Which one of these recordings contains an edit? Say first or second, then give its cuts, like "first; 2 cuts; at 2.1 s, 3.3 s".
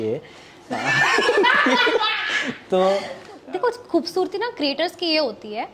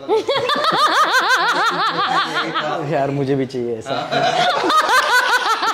first; 1 cut; at 3.3 s